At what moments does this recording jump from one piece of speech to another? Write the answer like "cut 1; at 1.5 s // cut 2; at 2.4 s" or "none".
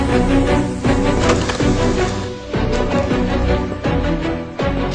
cut 1; at 1.5 s